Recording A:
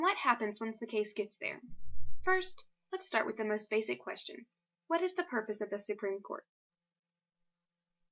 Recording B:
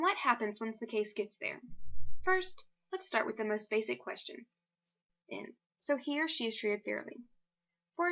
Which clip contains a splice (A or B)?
A